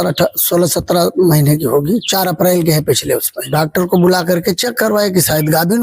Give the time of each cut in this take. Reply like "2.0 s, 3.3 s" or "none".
3.5 s